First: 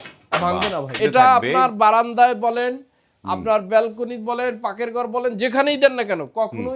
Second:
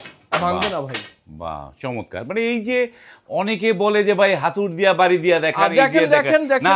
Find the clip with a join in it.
first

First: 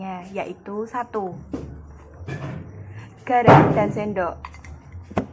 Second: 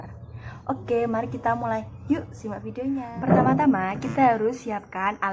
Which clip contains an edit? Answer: second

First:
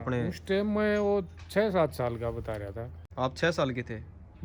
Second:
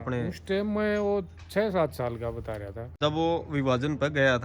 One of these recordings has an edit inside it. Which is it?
second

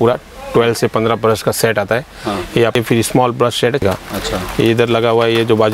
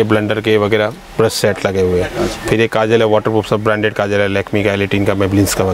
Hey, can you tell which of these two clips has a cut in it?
first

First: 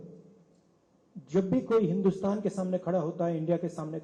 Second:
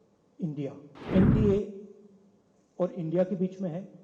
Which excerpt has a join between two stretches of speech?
second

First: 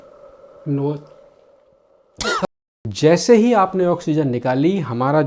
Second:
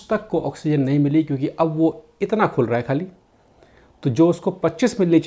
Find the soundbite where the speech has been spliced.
first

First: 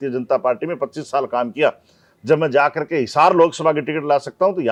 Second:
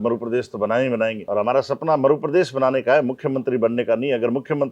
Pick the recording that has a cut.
second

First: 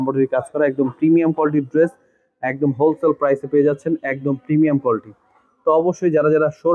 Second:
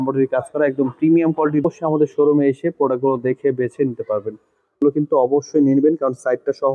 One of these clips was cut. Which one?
second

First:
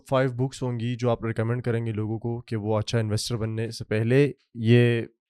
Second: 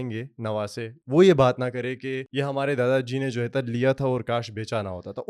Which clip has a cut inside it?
second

